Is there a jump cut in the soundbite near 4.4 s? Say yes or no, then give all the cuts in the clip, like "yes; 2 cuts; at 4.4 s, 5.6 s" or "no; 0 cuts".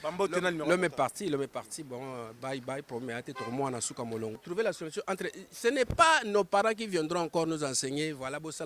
yes; 1 cut; at 4.4 s